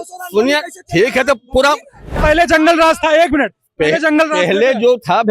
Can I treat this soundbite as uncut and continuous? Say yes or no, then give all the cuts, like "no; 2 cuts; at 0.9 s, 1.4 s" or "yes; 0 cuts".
no; 1 cut; at 2.2 s